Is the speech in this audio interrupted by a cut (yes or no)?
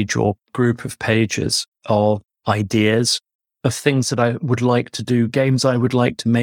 no